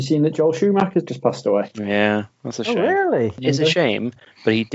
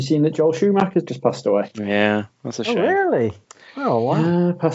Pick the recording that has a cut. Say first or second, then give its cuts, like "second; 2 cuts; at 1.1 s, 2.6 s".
first; 1 cut; at 3.4 s